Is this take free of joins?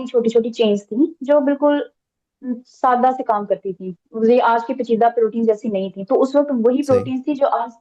yes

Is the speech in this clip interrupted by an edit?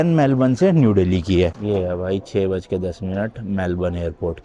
yes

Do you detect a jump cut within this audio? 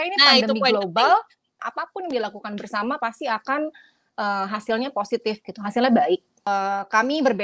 yes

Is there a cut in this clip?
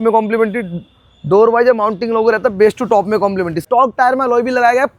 yes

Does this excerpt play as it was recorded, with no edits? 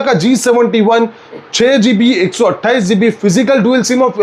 yes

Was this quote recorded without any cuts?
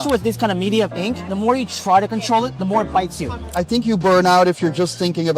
no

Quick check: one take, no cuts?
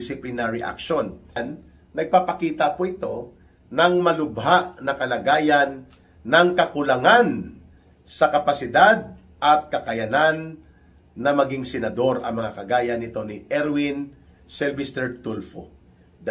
no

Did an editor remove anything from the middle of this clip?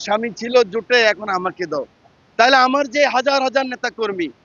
no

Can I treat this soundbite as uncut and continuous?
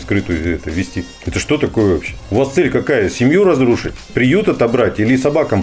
yes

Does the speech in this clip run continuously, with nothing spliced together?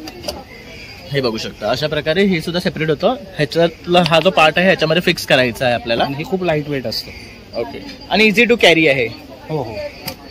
yes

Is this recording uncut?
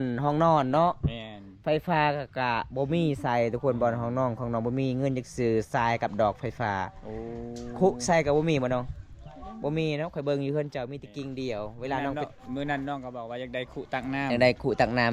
yes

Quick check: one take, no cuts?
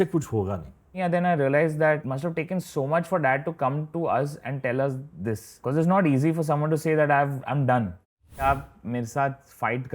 no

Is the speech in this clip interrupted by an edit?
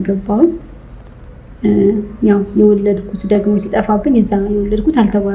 no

